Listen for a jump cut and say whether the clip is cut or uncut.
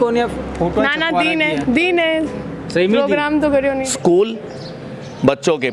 cut